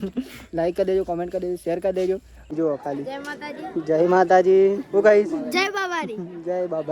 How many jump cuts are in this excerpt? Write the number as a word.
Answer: one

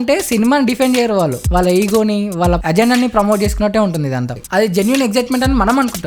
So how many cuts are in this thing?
one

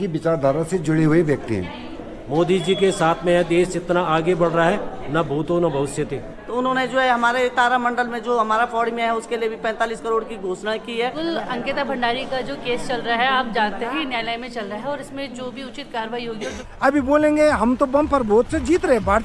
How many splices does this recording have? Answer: four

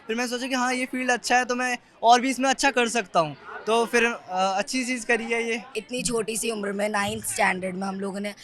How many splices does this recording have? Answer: one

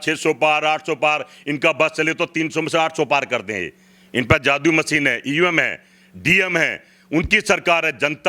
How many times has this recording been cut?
zero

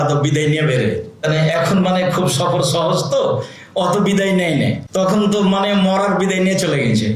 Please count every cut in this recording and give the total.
two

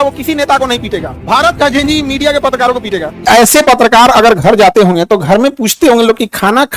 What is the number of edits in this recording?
one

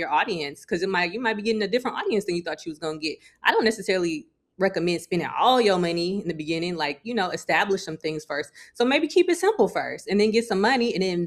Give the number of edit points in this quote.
zero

